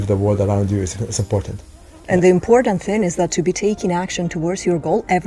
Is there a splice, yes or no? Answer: yes